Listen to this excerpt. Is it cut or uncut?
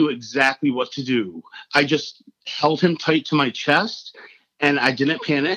uncut